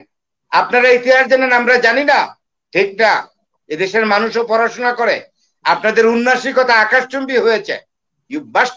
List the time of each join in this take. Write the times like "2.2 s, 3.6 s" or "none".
none